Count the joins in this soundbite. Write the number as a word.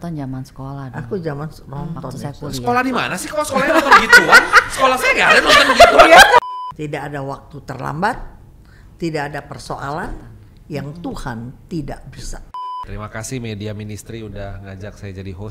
two